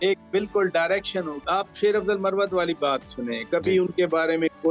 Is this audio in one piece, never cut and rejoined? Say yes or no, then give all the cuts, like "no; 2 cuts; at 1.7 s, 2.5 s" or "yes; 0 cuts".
no; 1 cut; at 1.4 s